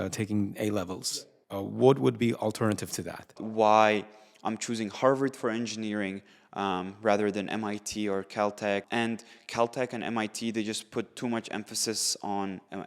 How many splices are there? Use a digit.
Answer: 3